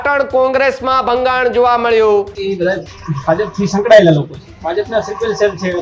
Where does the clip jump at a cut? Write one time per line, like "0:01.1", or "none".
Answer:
0:02.4
0:04.4